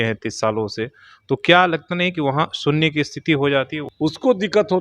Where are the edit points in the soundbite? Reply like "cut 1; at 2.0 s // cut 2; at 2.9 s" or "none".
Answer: cut 1; at 3.8 s